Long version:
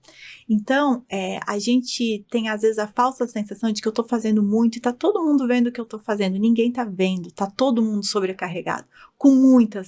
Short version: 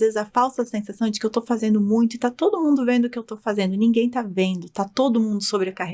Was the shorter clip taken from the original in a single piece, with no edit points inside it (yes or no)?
yes